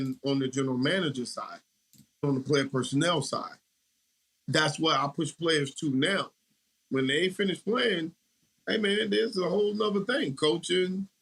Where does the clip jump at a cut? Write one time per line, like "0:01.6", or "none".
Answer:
0:02.2